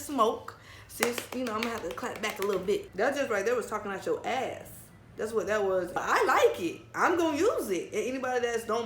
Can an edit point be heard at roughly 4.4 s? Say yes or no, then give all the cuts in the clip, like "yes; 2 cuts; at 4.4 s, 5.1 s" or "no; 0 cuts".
no; 2 cuts; at 2.9 s, 6.0 s